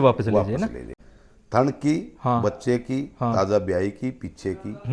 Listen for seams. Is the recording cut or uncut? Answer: cut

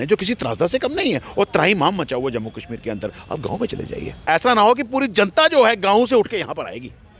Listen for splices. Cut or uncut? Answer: cut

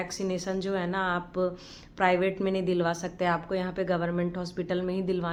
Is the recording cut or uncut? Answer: uncut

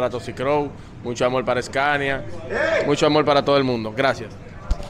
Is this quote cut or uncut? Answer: uncut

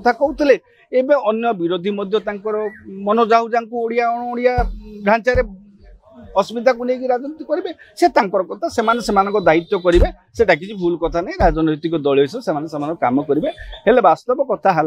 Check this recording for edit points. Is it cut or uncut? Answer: uncut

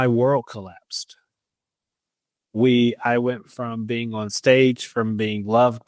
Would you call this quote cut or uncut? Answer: uncut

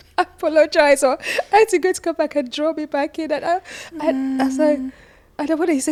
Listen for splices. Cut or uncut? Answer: uncut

